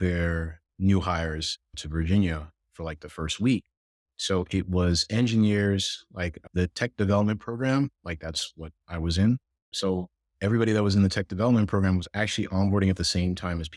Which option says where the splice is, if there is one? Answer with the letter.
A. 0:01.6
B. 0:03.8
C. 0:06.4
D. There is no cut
D